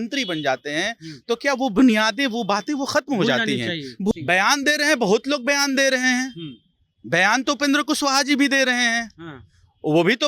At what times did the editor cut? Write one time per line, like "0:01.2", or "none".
0:04.1